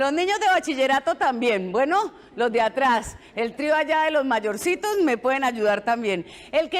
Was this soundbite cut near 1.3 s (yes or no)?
no